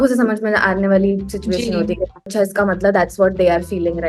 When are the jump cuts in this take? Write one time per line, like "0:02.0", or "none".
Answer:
0:02.3